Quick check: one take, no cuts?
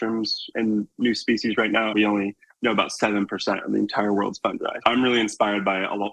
no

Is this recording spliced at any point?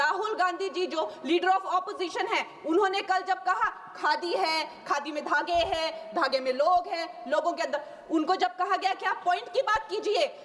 no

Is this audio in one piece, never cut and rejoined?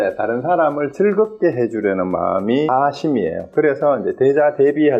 no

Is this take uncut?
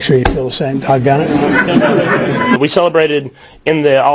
no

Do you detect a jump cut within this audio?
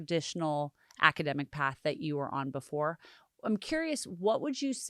no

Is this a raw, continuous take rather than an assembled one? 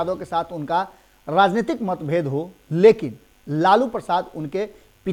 yes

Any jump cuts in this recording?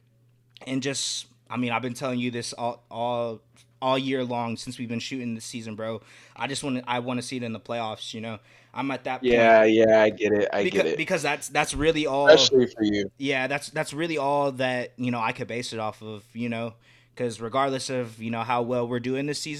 no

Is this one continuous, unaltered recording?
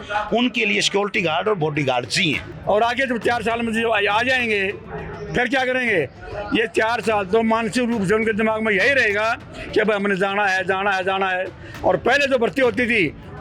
no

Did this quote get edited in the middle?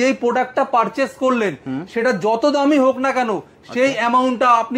no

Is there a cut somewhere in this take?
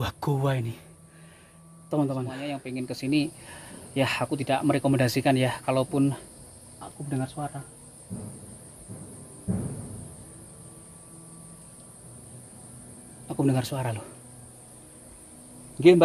yes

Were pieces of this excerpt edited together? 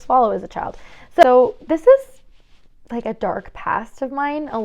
yes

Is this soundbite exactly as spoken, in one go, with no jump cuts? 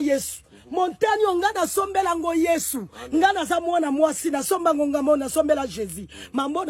yes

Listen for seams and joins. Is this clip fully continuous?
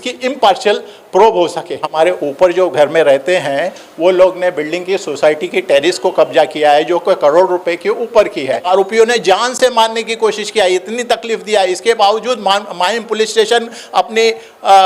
no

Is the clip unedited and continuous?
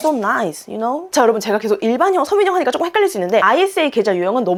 yes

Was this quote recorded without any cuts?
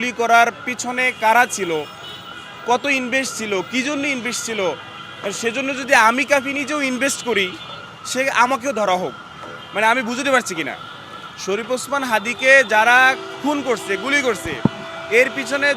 yes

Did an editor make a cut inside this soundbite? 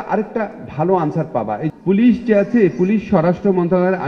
yes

